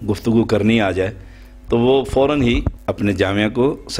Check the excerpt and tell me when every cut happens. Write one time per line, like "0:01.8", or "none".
0:02.8